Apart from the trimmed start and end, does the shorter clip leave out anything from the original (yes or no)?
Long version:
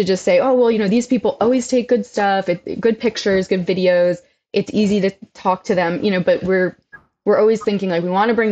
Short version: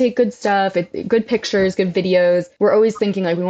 yes